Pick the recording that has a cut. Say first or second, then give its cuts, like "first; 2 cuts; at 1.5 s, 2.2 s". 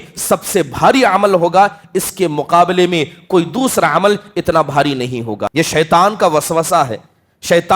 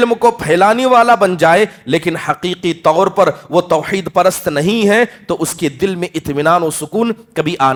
first; 1 cut; at 5.5 s